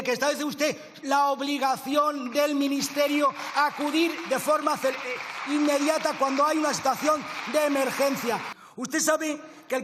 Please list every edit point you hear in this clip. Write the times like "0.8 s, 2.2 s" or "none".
8.5 s